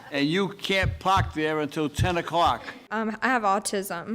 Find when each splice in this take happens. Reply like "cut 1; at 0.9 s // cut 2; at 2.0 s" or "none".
cut 1; at 2.7 s